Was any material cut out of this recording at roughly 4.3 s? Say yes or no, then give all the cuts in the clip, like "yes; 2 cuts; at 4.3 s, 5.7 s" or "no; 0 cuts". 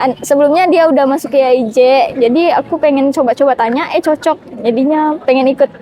no; 1 cut; at 2.1 s